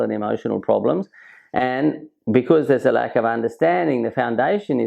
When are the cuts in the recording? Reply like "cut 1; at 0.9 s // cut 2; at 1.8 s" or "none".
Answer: none